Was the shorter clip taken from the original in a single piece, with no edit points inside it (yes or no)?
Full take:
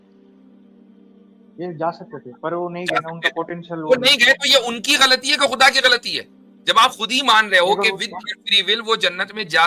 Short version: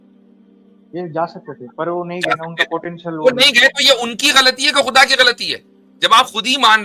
no